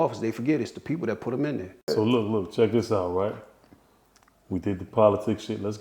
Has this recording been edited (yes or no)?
yes